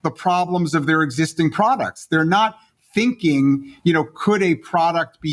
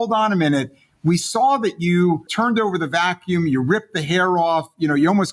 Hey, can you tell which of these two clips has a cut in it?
second; 1 cut; at 2.3 s

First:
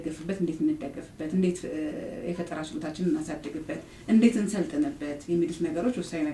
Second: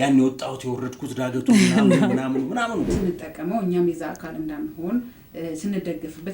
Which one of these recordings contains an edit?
second; 1 cut; at 2.9 s

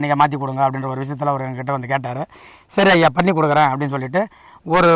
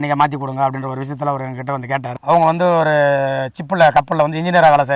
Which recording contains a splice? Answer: second; 1 cut; at 2.1 s

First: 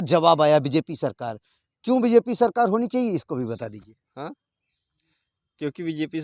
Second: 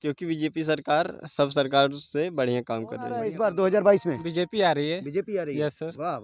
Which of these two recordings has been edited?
second; 1 cut; at 3.2 s

